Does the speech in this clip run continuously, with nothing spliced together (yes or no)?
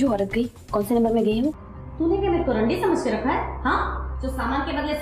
no